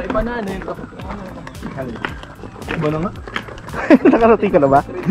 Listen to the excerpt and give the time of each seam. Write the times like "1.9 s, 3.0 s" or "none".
none

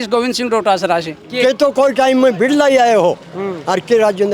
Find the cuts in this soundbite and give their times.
1.2 s

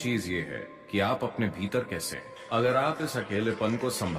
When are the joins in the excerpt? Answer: 2.3 s

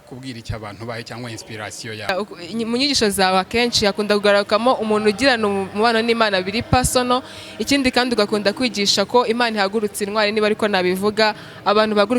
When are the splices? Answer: 2.1 s

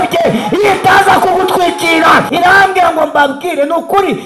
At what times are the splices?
2.3 s

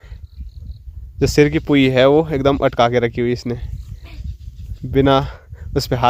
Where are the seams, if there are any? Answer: none

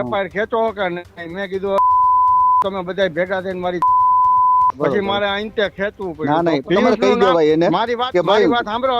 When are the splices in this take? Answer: 4.8 s, 6.6 s

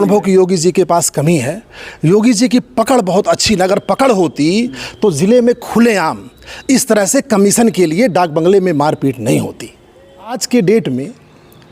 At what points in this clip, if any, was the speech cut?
10.4 s

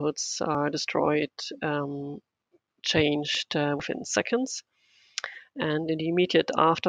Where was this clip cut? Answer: none

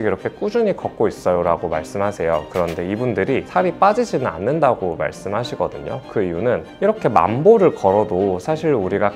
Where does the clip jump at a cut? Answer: 3.5 s

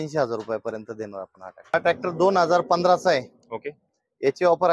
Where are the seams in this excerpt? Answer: 1.7 s

